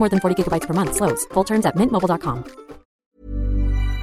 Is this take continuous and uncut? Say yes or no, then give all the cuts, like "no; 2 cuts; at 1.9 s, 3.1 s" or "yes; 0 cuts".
no; 1 cut; at 3.0 s